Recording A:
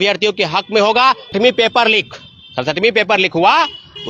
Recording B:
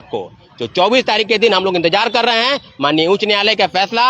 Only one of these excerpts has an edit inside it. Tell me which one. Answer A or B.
A